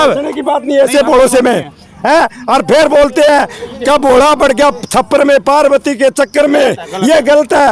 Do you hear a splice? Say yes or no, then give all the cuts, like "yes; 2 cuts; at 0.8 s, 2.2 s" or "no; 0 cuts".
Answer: no; 0 cuts